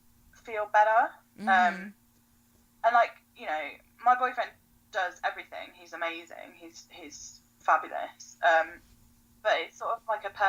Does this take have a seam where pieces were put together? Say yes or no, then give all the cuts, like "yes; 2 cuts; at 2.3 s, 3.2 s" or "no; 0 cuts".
no; 0 cuts